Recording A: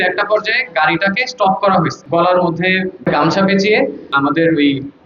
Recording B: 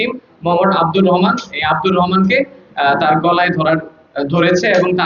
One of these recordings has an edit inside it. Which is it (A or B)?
A